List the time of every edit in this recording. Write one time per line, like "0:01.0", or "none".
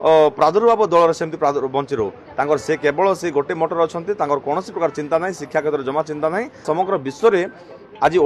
0:06.6